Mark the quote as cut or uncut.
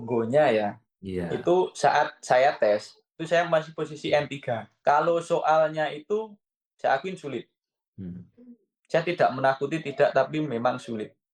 cut